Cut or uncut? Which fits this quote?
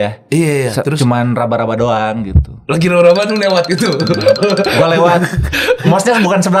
uncut